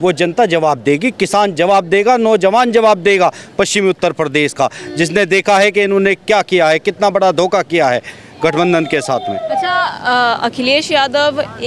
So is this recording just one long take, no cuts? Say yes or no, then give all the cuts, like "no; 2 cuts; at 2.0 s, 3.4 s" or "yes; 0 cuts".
yes; 0 cuts